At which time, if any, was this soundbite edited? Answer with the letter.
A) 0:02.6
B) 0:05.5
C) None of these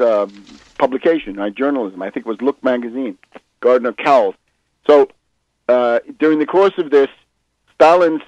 B